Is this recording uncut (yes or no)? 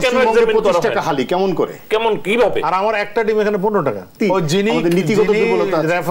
no